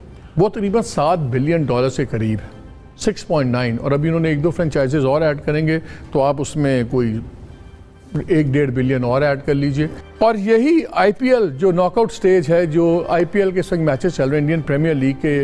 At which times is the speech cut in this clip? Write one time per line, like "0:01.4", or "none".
0:10.0